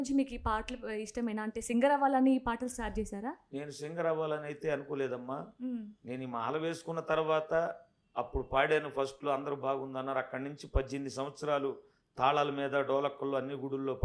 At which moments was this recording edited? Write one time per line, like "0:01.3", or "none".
none